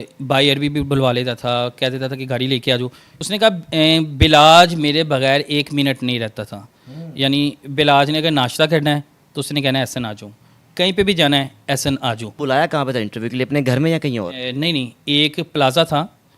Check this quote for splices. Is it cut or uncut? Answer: cut